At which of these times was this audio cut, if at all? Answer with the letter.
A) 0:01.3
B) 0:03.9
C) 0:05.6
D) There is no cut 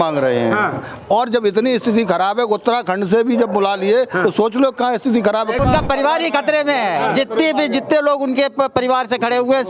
C